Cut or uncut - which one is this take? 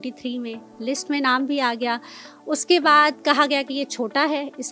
uncut